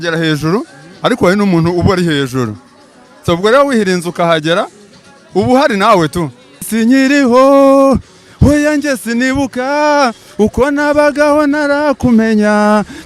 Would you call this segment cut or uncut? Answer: cut